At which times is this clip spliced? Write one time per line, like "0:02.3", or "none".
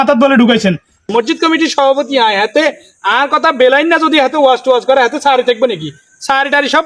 0:01.0